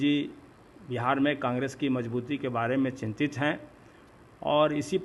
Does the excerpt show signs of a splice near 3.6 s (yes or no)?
no